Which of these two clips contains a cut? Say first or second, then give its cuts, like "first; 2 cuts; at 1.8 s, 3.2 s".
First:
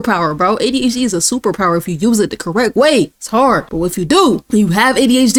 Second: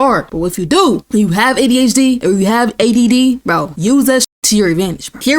second; 1 cut; at 4.1 s